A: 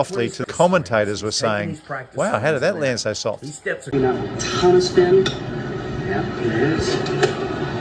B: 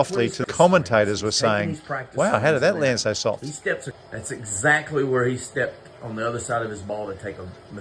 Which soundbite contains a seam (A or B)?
B